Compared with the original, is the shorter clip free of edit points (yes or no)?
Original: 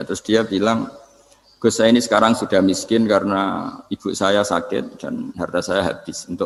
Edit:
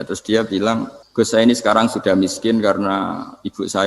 no